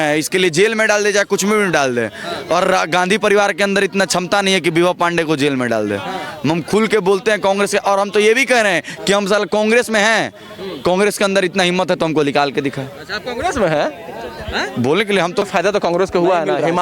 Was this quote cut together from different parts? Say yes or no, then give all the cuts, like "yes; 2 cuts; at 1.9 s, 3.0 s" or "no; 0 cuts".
yes; 1 cut; at 15.5 s